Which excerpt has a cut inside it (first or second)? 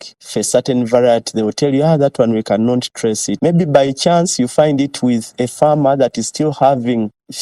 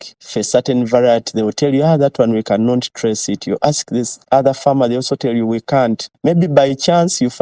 first